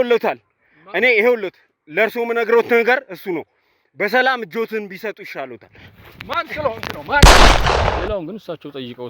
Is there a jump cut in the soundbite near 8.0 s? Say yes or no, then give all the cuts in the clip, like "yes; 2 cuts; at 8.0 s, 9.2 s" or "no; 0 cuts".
yes; 2 cuts; at 7.2 s, 8.0 s